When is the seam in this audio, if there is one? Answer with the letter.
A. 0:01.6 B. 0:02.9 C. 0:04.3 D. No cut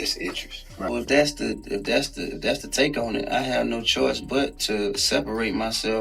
D